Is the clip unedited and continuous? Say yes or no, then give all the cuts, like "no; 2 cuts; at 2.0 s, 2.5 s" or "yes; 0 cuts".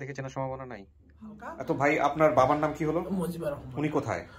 no; 1 cut; at 1.5 s